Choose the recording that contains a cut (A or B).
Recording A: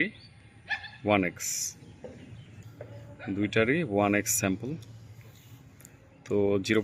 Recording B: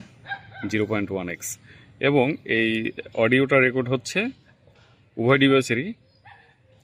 A